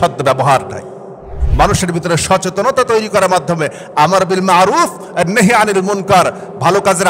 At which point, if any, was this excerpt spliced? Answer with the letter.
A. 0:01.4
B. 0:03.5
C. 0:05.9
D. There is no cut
A